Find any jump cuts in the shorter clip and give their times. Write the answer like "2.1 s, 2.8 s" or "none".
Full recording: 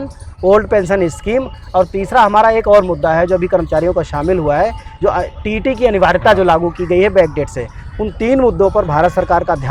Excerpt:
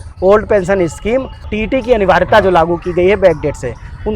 1.4 s

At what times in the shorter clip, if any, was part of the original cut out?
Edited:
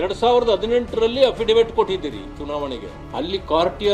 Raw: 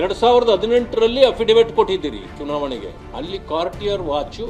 none

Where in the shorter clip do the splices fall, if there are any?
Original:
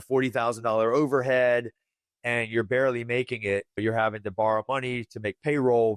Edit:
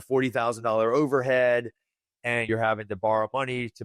2.5 s

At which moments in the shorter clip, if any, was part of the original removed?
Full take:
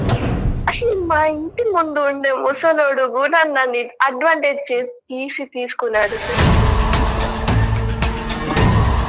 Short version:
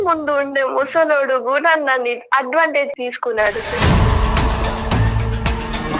2.9 s

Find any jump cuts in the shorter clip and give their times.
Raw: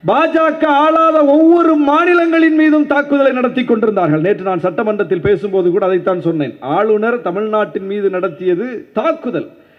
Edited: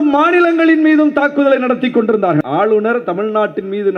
2.4 s

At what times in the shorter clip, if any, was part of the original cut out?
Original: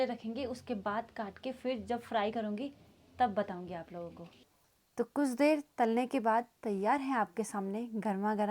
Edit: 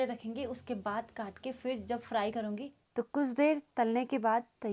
2.8 s

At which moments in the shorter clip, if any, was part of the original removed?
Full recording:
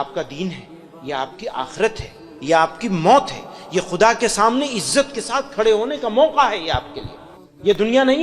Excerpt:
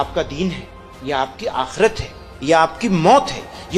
none

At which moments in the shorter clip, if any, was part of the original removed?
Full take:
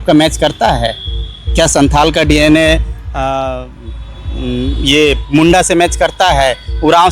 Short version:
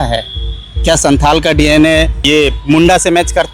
2.2 s

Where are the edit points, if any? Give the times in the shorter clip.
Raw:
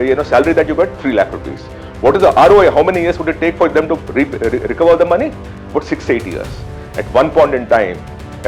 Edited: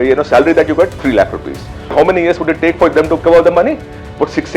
1.9 s, 3.2 s

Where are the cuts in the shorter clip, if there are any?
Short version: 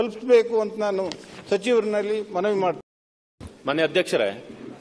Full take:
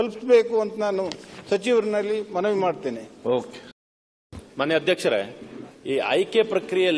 2.8 s

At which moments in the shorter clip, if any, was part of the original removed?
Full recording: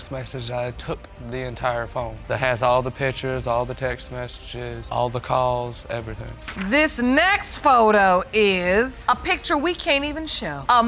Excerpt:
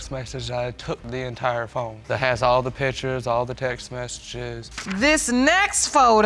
1.0 s, 4.5 s

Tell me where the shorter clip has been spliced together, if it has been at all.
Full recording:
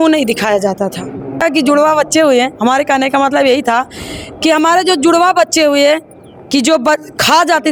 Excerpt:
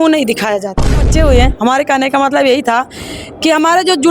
1.1 s

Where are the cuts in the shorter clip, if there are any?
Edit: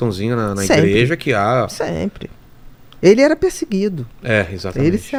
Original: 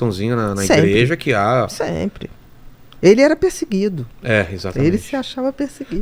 none

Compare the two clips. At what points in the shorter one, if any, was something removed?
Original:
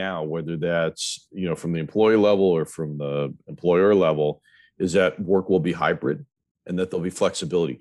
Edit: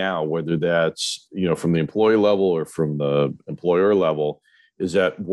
none

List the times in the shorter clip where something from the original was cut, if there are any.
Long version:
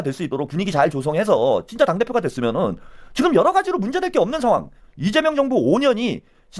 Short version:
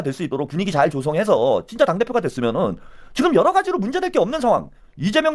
none

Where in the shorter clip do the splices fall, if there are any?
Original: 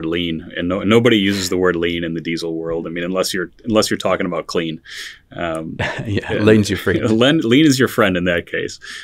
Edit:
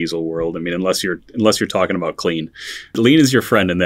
3.0 s

